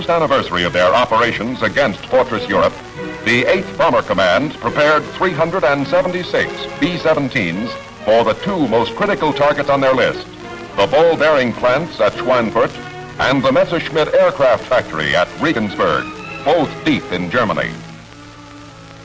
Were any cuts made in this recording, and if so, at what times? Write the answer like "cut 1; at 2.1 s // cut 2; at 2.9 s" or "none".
cut 1; at 12.7 s